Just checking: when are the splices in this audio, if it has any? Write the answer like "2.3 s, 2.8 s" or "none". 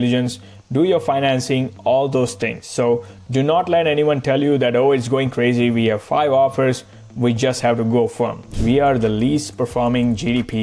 8.5 s